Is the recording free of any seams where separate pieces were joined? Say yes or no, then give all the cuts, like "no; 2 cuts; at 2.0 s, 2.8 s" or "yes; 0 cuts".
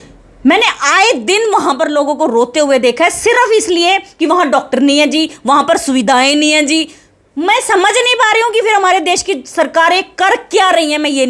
yes; 0 cuts